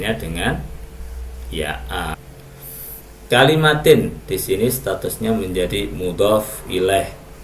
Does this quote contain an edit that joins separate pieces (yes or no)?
yes